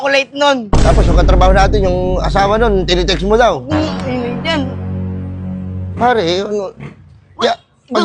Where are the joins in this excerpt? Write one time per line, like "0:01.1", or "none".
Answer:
none